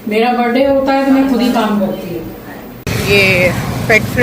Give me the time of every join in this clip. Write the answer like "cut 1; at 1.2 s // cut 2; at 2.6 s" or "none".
cut 1; at 2.8 s